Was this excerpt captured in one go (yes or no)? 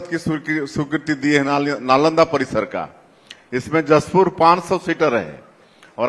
yes